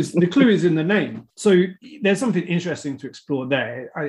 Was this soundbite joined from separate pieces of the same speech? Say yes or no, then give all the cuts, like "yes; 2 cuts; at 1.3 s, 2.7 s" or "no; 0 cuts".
yes; 1 cut; at 1.2 s